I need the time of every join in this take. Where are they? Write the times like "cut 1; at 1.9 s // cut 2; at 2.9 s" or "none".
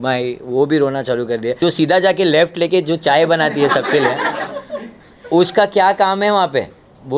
cut 1; at 1.6 s